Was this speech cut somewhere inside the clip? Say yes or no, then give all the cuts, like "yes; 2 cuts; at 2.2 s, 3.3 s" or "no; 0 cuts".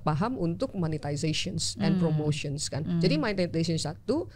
no; 0 cuts